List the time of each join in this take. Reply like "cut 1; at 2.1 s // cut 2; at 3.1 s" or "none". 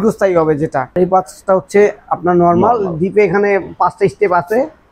cut 1; at 1.0 s